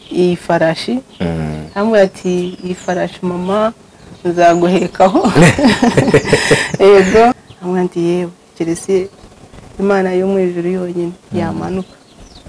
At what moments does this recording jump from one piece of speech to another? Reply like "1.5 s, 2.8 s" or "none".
7.4 s